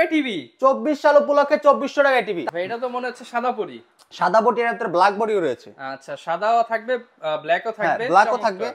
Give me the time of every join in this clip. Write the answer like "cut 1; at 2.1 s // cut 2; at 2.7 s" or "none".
cut 1; at 2.4 s